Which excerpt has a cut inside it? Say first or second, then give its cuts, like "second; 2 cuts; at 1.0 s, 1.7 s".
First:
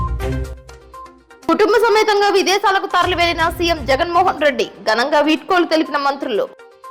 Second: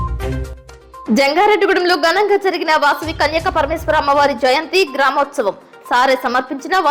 second; 1 cut; at 1.0 s